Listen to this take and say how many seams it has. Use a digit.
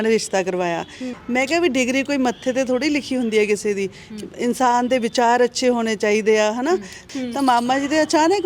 2